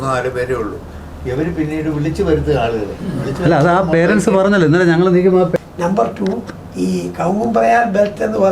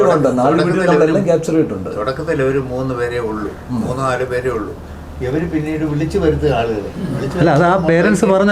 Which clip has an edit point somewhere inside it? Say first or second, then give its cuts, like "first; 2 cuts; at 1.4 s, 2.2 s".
first; 1 cut; at 5.5 s